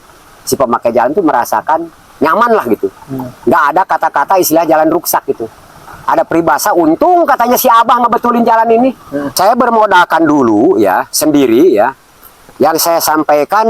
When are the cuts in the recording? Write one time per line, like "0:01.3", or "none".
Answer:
0:09.0